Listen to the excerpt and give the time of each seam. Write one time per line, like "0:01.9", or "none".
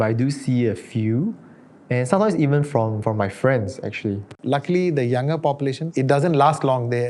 0:04.3